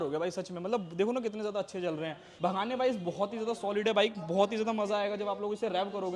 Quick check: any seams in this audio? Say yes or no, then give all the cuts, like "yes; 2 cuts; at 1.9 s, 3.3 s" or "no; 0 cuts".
yes; 1 cut; at 2.3 s